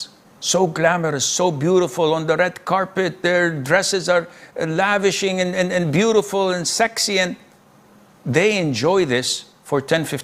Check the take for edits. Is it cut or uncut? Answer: uncut